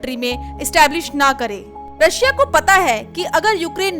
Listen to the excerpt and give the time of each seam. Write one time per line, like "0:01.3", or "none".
0:01.8

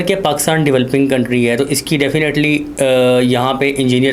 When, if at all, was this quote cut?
none

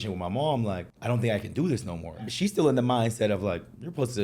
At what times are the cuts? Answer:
0:00.9
0:02.3

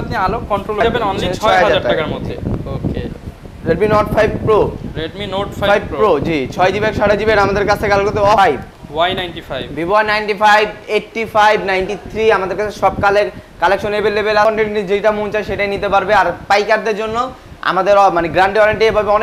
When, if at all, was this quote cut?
0:00.8
0:08.4
0:14.5

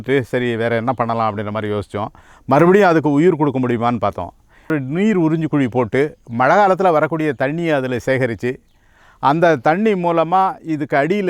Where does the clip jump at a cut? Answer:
0:04.7

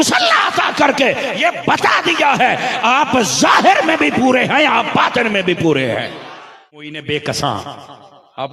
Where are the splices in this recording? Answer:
0:06.9

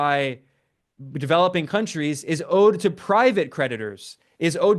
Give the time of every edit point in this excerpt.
none

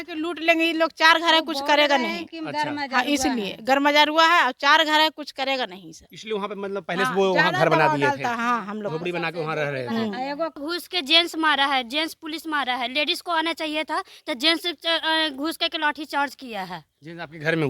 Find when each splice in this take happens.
0:10.6

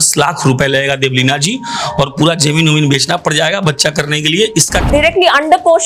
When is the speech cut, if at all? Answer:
0:04.9

